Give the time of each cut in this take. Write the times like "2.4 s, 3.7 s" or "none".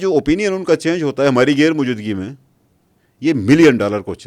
none